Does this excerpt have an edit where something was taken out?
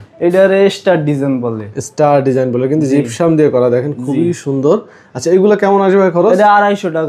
no; 0 cuts

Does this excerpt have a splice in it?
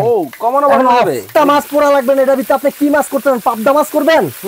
yes; 1 cut; at 1.3 s

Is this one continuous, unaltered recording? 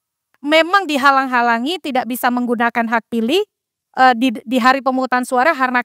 yes; 0 cuts

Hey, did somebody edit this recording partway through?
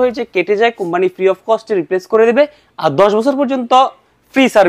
no; 0 cuts

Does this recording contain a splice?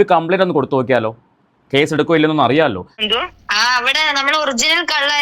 yes; 1 cut; at 3.0 s

